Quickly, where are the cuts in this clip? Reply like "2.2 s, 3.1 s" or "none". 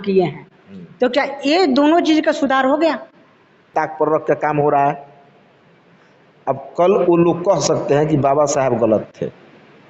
3.7 s